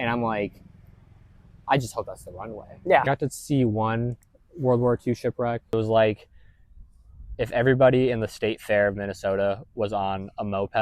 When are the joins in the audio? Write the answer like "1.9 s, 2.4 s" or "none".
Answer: 3.1 s, 5.7 s

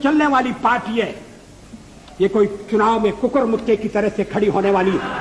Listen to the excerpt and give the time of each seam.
none

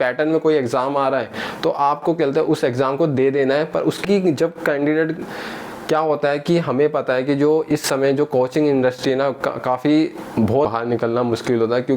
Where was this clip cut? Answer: 4.0 s, 10.7 s

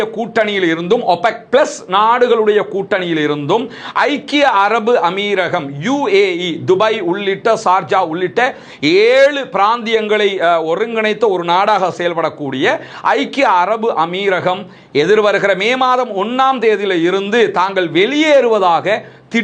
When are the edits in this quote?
none

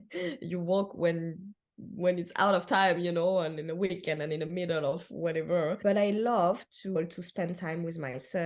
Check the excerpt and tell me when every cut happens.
5.8 s, 7.0 s

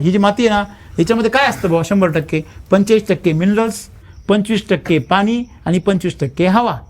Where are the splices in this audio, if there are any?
none

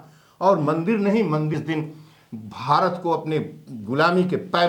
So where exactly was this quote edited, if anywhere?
1.5 s

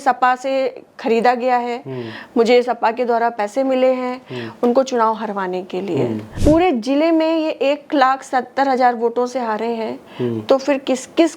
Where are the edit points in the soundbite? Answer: 6.3 s

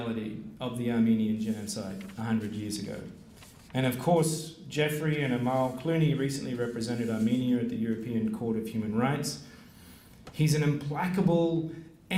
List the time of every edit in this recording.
none

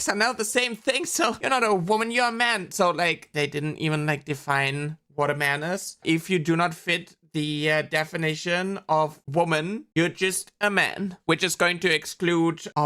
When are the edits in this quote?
1.4 s, 3.3 s, 6.0 s

